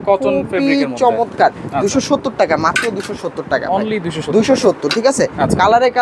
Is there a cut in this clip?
no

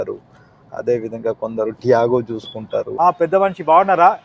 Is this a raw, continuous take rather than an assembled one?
no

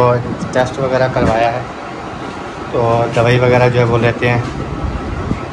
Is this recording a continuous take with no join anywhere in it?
yes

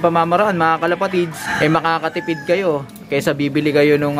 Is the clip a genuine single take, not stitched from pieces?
no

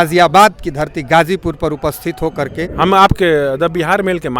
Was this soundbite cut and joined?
yes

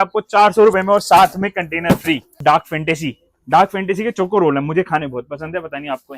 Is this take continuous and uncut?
no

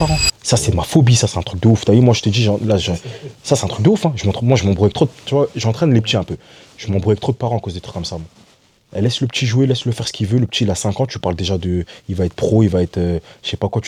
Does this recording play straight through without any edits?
yes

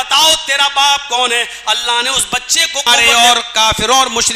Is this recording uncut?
no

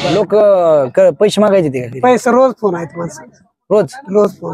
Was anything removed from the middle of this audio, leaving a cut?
no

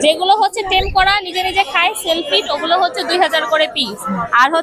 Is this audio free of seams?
yes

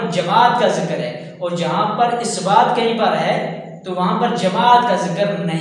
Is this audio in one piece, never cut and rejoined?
yes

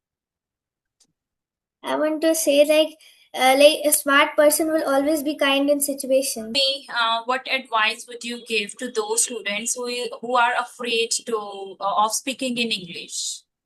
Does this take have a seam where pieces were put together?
yes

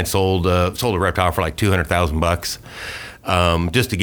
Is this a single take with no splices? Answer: yes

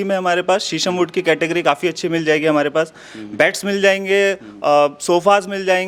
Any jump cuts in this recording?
no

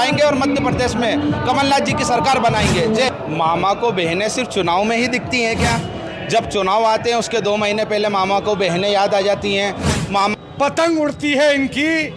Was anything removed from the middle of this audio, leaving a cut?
yes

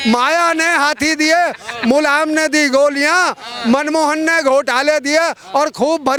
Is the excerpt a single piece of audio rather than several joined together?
yes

